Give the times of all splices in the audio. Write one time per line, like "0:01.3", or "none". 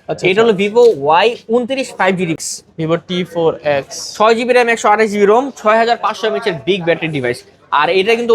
0:02.4